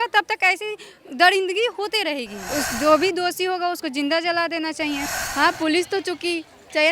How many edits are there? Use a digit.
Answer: 2